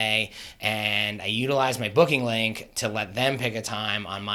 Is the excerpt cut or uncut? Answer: uncut